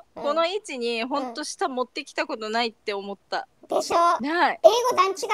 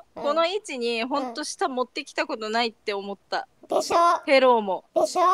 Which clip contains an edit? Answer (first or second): first